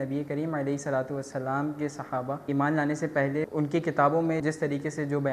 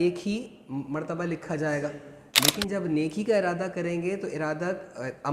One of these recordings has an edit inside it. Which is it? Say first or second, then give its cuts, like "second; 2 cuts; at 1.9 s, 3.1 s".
first; 3 cuts; at 2.4 s, 3.5 s, 4.4 s